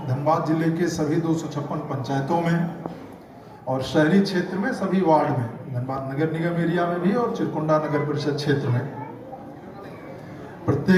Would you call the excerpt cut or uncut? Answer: uncut